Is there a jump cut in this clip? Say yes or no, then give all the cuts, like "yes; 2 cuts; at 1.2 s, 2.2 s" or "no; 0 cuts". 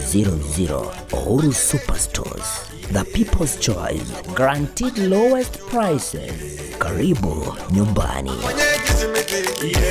yes; 1 cut; at 8.4 s